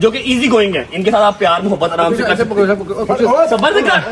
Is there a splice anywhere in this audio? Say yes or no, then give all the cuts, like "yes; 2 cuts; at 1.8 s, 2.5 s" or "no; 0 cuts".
no; 0 cuts